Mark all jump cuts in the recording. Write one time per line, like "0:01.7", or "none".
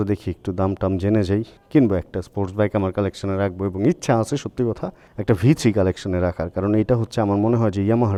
none

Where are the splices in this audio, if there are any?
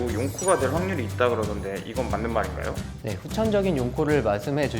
0:02.9

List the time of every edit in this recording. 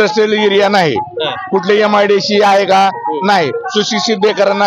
none

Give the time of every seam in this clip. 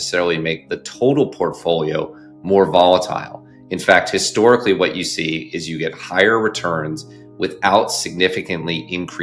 none

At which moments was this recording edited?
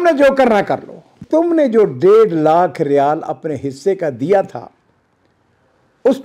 0:01.2

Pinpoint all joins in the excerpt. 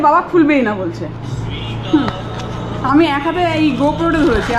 none

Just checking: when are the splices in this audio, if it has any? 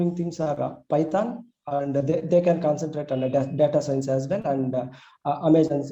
none

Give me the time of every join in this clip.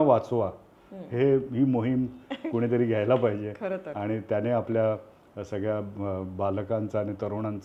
none

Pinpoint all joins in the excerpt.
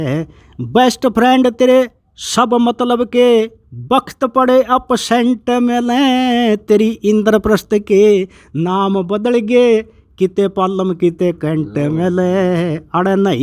none

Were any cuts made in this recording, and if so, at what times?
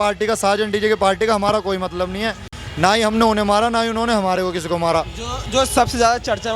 none

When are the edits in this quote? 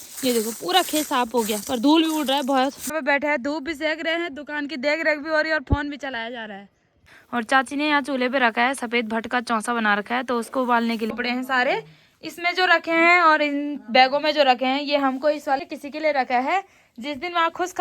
0:02.9
0:07.0
0:11.1
0:15.6

